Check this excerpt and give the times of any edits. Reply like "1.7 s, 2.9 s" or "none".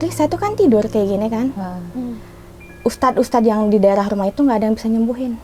2.6 s